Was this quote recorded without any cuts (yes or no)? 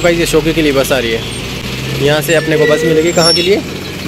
yes